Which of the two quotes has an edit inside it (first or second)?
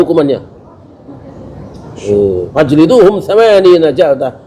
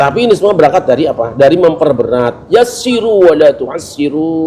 first